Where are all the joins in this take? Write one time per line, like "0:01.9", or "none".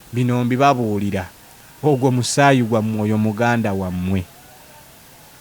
none